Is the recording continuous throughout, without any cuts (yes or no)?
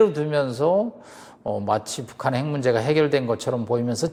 yes